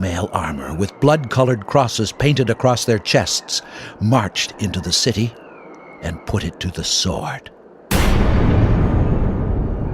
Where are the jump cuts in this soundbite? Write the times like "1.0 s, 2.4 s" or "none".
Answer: 7.7 s